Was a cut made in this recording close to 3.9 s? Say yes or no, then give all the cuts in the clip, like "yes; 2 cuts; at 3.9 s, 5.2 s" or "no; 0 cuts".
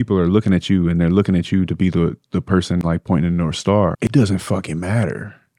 yes; 1 cut; at 3.9 s